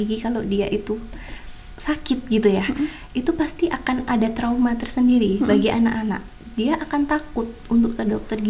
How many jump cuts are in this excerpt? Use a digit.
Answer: 0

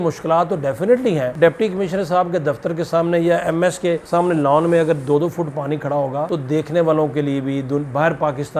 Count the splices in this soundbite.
0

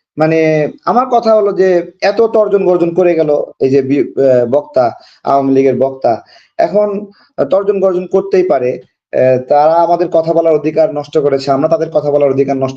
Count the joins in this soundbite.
0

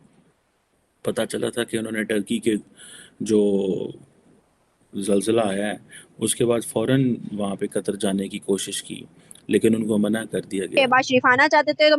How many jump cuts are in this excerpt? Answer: 1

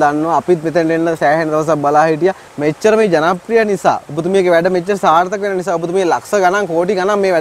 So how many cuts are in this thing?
1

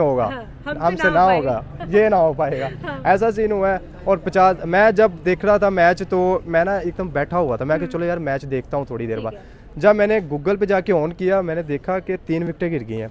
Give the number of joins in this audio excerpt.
0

